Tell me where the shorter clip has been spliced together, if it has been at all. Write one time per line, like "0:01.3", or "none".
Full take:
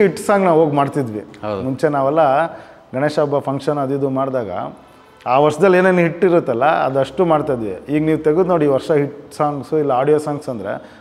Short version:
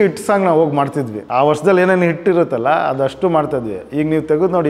0:01.2